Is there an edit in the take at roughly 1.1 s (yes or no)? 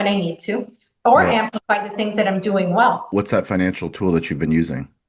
no